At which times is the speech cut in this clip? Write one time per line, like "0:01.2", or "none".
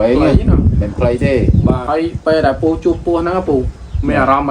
0:01.8